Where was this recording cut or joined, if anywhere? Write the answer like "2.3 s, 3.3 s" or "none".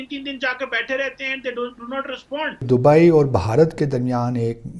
2.6 s